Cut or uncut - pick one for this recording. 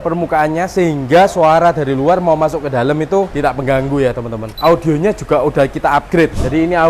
cut